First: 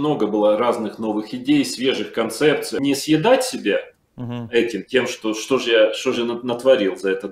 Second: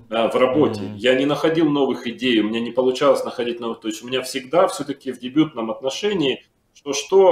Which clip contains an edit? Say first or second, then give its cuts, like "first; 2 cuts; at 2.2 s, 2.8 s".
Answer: first; 1 cut; at 2.7 s